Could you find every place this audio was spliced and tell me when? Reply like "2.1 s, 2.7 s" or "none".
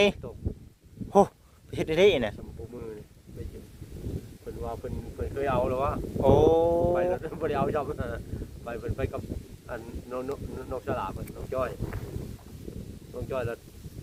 none